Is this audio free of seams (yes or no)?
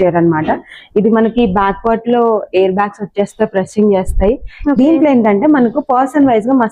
yes